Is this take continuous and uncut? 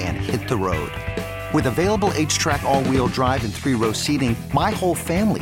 yes; 0 cuts

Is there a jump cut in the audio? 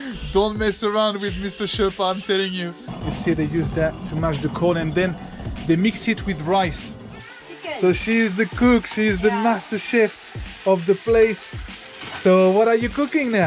yes; 2 cuts; at 3.0 s, 7.3 s

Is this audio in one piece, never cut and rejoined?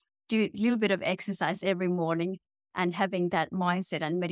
yes; 0 cuts

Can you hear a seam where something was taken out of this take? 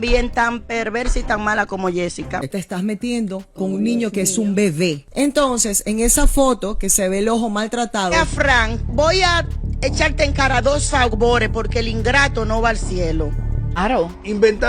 yes; 3 cuts; at 2.4 s, 8.1 s, 13.8 s

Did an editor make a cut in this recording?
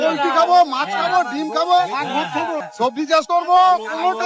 yes; 1 cut; at 2.7 s

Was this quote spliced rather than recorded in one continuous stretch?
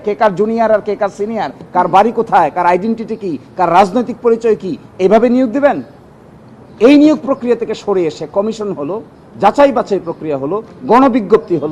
no; 0 cuts

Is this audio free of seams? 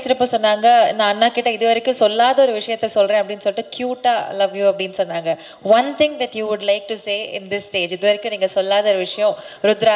yes; 0 cuts

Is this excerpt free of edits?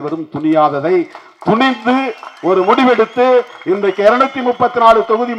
yes; 0 cuts

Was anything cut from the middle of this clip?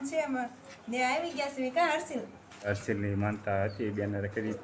yes; 1 cut; at 2.7 s

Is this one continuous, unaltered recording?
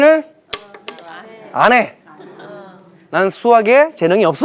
yes; 0 cuts

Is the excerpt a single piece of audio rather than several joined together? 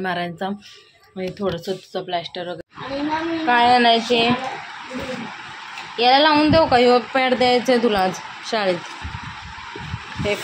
no; 1 cut; at 2.6 s

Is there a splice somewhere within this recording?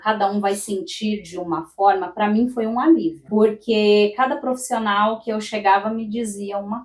yes; 1 cut; at 3.2 s

